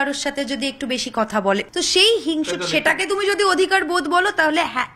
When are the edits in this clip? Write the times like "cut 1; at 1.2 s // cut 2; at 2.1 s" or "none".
cut 1; at 1.7 s